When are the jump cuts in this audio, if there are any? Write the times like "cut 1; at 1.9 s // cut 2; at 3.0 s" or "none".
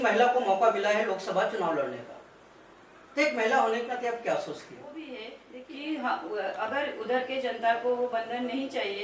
cut 1; at 5.1 s

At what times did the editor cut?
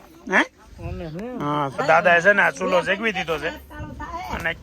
cut 1; at 1.7 s

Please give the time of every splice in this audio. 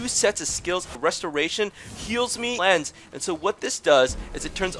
cut 1; at 0.9 s // cut 2; at 2.5 s

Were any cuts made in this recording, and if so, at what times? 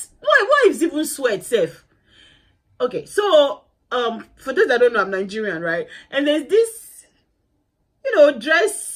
none

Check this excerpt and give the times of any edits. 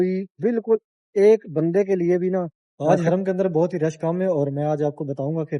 cut 1; at 2.7 s

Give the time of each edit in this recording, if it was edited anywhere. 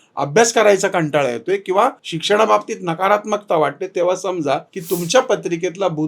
cut 1; at 2.1 s // cut 2; at 4.7 s

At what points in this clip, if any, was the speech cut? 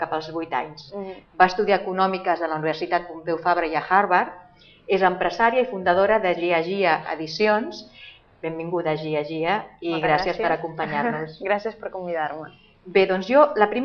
cut 1; at 12.4 s

